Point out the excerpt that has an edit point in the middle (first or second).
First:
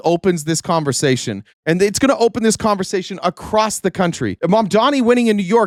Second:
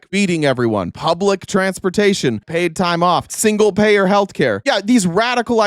second